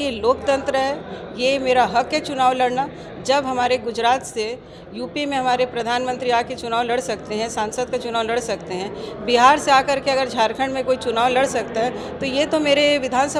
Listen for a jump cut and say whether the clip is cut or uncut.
uncut